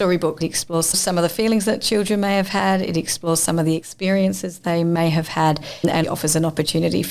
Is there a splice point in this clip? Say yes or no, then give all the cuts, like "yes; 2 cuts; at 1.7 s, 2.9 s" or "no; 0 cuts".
yes; 2 cuts; at 1.0 s, 5.9 s